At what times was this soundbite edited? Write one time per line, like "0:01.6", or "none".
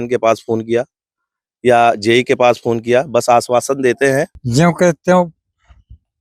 0:04.4